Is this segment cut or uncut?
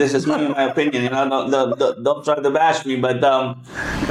uncut